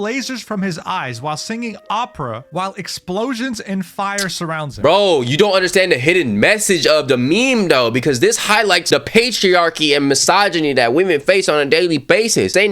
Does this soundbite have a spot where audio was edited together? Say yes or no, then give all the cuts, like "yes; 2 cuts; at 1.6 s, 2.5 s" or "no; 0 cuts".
no; 0 cuts